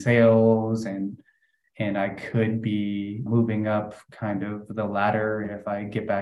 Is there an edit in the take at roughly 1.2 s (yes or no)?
no